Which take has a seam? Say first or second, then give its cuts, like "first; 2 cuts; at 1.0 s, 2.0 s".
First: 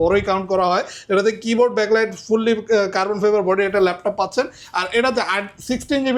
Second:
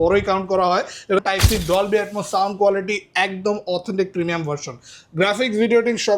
second; 1 cut; at 1.2 s